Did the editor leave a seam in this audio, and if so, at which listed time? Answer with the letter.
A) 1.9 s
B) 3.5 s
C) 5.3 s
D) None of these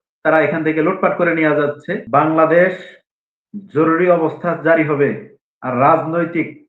A